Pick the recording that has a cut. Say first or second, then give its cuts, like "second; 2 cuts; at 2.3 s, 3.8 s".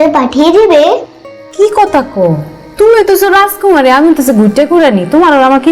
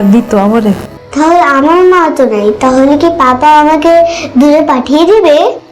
second; 1 cut; at 1.0 s